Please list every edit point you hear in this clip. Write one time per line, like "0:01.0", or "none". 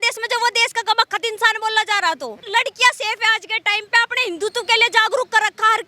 0:02.4